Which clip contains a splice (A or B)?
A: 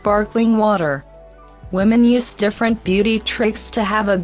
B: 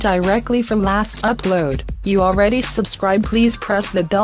A